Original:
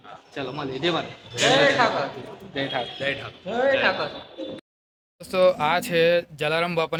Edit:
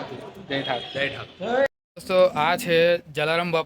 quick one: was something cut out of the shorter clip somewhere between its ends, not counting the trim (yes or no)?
yes